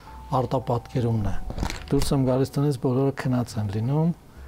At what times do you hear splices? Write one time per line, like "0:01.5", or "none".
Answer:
0:01.7

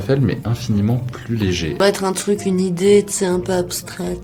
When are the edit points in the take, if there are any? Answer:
none

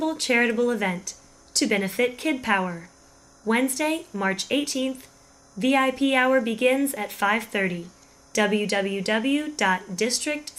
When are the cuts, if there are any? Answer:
none

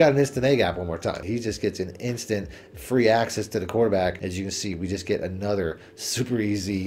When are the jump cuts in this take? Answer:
0:01.2
0:04.3

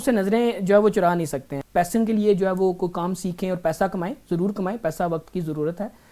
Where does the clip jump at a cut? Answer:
0:01.6

